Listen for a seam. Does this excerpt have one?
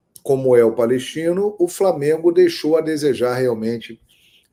no; 0 cuts

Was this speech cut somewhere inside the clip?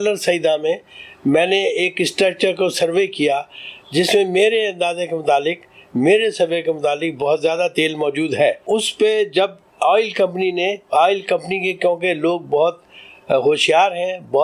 no; 0 cuts

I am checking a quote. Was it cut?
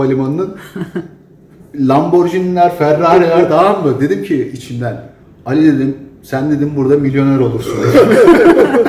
no; 0 cuts

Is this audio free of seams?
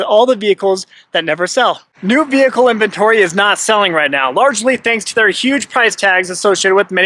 no; 1 cut; at 1.9 s

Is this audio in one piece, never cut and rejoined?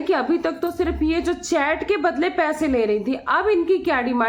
yes; 0 cuts

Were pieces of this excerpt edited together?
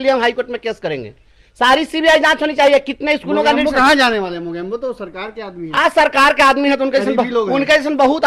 no; 0 cuts

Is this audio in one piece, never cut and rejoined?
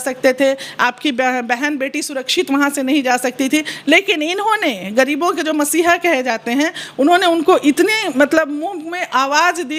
yes; 0 cuts

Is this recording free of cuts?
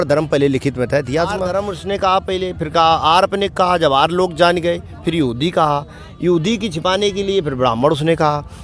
no; 1 cut; at 1.5 s

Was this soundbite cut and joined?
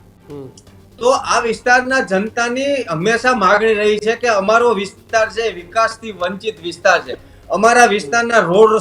no; 0 cuts

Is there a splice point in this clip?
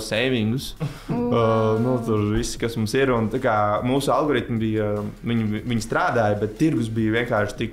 no; 0 cuts

